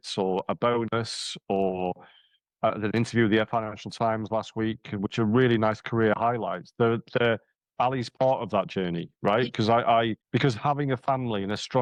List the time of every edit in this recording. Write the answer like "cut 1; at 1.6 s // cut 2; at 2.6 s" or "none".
none

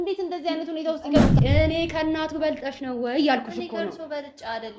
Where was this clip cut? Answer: cut 1; at 1.4 s

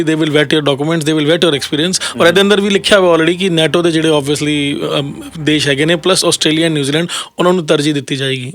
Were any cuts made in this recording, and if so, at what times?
none

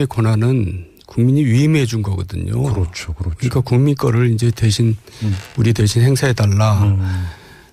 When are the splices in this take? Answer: none

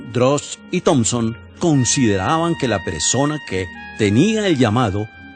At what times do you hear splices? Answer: cut 1; at 4.0 s

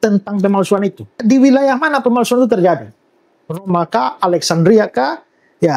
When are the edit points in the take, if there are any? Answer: cut 1; at 1.2 s

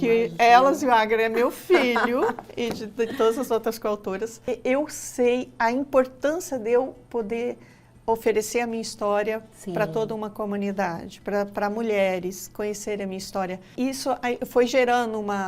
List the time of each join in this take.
cut 1; at 4.5 s // cut 2; at 13.7 s

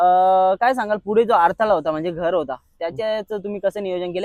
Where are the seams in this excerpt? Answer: none

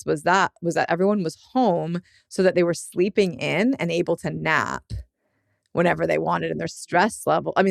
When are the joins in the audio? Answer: none

